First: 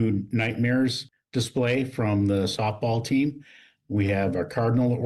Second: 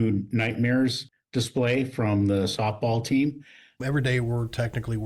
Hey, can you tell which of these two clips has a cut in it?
second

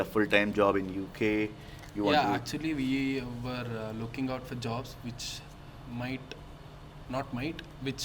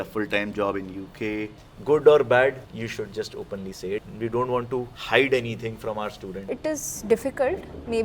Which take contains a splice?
second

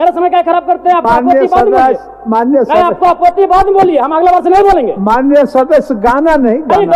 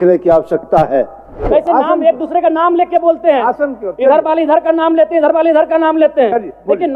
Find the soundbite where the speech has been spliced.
second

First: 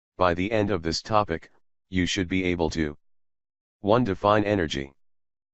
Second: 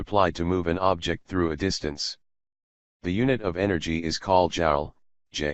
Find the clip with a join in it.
first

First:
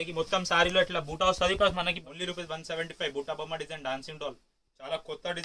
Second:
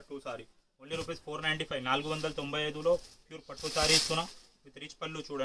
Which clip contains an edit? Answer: first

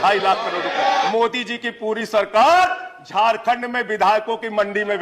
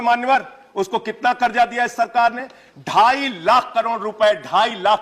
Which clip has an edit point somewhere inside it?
first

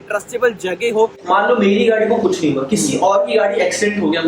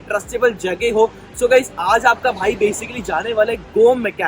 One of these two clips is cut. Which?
first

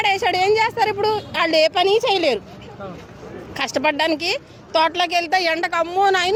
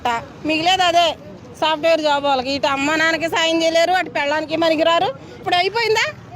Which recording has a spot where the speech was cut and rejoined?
second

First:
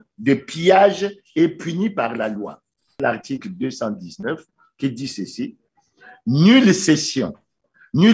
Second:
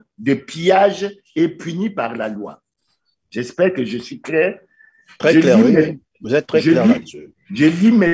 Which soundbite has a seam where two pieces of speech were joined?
first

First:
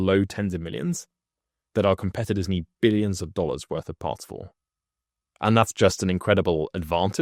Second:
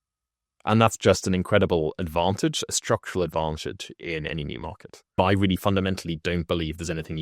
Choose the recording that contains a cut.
second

